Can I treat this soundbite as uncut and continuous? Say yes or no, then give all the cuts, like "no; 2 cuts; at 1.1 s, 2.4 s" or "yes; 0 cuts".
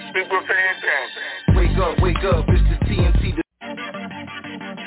no; 1 cut; at 3.4 s